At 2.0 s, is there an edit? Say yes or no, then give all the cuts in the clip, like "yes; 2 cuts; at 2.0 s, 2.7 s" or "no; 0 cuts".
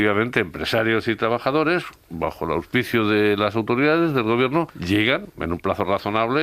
no; 1 cut; at 4.8 s